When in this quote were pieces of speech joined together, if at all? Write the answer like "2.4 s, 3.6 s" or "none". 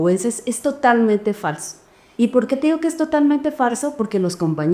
none